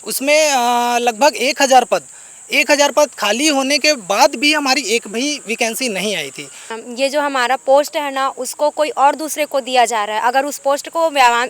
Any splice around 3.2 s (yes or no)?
no